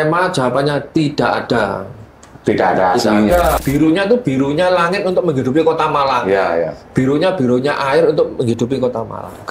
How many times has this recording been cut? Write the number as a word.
one